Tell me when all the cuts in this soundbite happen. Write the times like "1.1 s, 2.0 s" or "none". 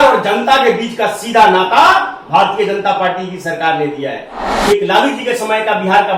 4.4 s